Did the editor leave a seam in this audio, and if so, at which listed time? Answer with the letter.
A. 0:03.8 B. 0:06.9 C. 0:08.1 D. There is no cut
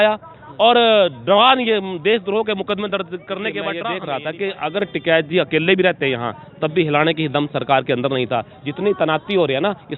A